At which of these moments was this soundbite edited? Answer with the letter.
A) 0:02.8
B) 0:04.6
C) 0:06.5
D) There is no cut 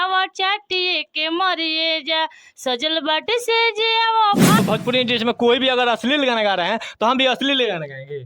B